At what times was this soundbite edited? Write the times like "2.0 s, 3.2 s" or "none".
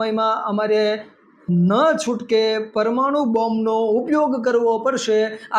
none

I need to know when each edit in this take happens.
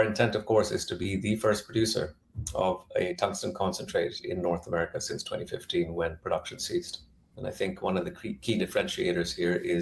7.3 s

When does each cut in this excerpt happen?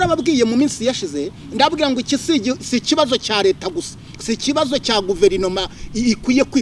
none

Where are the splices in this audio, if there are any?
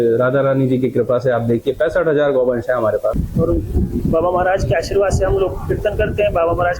3.2 s

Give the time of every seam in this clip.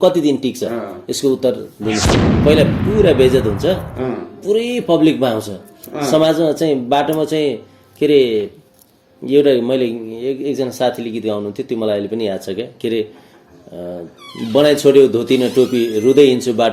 2.3 s

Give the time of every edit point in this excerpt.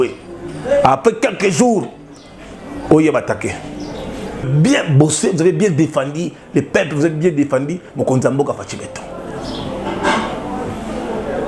4.5 s

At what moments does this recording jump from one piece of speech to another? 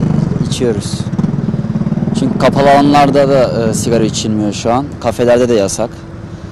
none

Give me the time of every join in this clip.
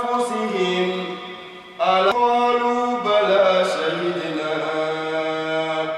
2.1 s

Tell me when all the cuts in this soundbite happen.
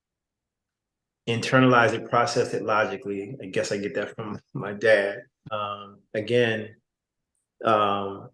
5.3 s

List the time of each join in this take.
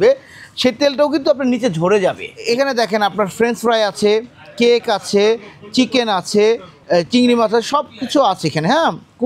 2.3 s, 6.7 s

